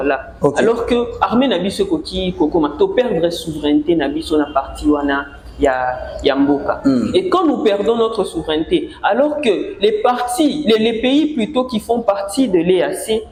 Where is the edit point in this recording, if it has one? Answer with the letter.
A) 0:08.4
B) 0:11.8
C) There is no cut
C